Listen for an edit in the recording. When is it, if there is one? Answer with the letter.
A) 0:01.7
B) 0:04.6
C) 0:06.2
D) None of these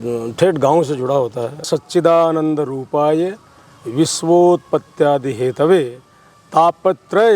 A